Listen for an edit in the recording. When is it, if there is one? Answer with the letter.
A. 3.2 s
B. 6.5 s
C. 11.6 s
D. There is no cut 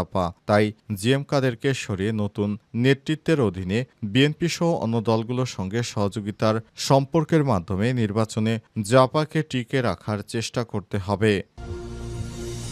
C